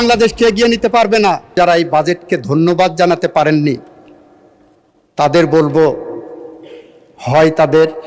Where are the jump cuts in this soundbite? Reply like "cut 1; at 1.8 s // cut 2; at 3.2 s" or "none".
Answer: cut 1; at 1.5 s